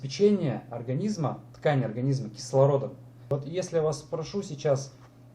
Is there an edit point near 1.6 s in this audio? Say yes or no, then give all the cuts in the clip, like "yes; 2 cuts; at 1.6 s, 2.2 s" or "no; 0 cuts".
no; 1 cut; at 3.3 s